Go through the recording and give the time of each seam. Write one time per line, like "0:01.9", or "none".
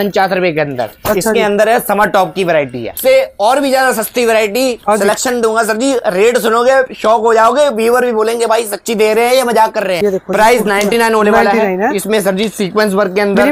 0:02.8
0:10.0